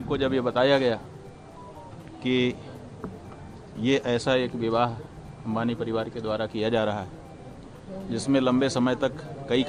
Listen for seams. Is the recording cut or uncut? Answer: uncut